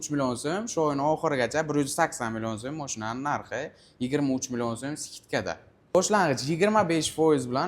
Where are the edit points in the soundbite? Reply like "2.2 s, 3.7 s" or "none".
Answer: 5.9 s